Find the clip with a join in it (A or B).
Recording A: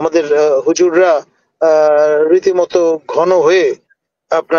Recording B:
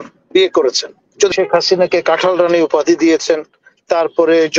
B